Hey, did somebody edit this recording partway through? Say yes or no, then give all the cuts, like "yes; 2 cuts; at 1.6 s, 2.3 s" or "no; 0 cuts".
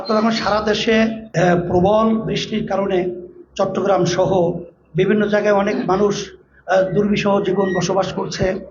yes; 1 cut; at 1.2 s